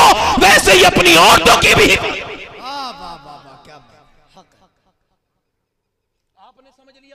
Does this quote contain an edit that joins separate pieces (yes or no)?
no